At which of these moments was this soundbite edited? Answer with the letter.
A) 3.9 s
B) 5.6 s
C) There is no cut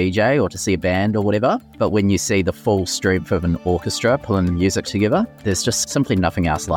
B